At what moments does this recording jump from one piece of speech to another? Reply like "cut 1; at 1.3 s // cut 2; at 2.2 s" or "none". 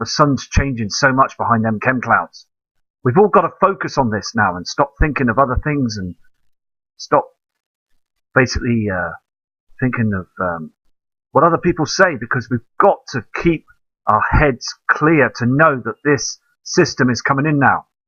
cut 1; at 10.0 s